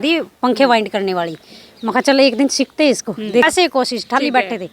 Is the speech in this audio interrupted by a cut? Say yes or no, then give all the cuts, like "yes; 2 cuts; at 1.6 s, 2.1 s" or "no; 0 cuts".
yes; 1 cut; at 3.4 s